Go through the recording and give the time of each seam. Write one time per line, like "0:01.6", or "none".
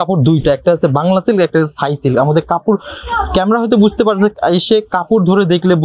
none